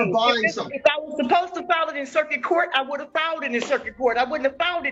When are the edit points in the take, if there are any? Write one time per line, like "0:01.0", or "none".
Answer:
none